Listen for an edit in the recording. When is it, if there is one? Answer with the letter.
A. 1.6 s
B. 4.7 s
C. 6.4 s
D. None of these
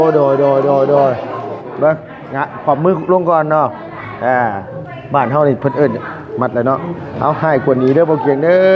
A